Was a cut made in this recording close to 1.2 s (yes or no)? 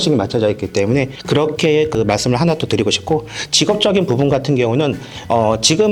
no